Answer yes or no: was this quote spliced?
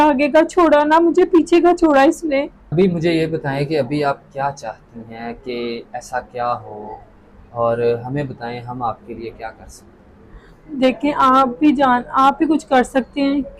no